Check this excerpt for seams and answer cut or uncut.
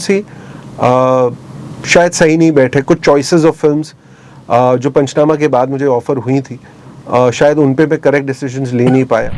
uncut